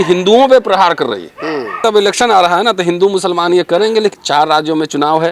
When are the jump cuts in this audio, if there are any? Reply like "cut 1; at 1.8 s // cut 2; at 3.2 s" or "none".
cut 1; at 1.8 s // cut 2; at 4.1 s